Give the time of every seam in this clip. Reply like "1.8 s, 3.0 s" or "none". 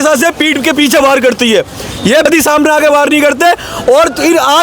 2.2 s